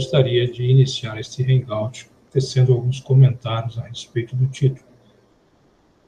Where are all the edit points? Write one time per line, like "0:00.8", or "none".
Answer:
none